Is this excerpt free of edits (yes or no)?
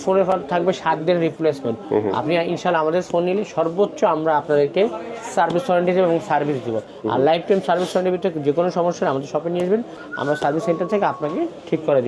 yes